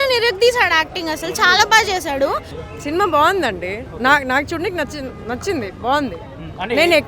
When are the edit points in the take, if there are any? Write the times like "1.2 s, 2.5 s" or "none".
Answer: 2.6 s